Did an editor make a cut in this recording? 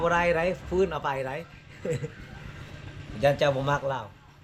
no; 0 cuts

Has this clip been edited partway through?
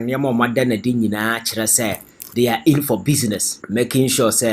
yes; 1 cut; at 3.5 s

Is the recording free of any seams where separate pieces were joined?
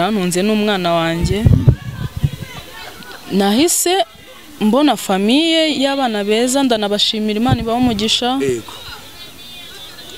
yes; 0 cuts

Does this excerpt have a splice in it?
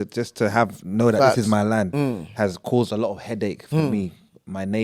no; 0 cuts

